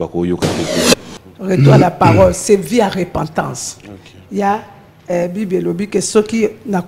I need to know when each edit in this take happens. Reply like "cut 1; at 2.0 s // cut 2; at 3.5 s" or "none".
cut 1; at 0.9 s